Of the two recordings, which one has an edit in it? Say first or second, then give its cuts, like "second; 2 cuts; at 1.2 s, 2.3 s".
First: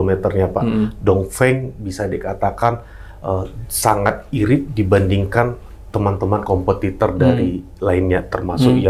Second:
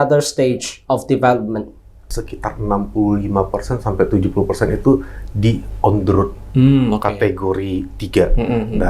second; 1 cut; at 2.2 s